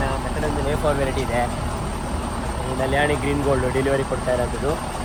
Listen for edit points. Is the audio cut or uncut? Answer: uncut